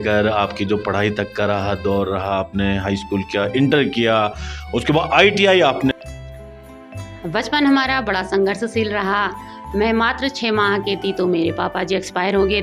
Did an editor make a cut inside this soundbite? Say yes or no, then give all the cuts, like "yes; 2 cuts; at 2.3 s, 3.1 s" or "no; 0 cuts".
yes; 1 cut; at 5.9 s